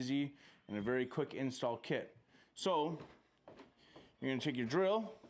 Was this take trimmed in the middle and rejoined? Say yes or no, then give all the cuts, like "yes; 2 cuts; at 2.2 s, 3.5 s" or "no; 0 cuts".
no; 0 cuts